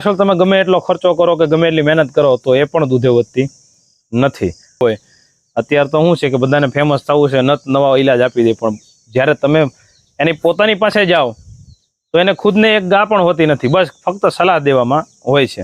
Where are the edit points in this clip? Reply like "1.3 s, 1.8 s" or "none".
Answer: 4.8 s